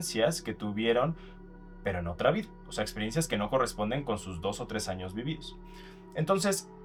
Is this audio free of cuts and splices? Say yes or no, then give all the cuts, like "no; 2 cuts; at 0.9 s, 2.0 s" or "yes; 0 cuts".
yes; 0 cuts